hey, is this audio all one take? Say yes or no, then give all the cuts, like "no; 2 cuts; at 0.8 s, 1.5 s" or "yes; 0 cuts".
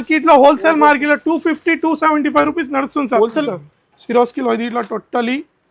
no; 1 cut; at 3.5 s